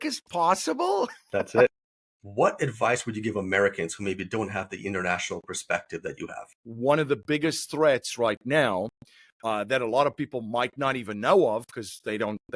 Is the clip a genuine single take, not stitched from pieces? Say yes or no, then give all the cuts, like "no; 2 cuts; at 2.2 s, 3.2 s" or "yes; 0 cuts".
no; 2 cuts; at 1.7 s, 6.7 s